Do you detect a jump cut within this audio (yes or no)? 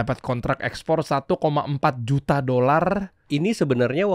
yes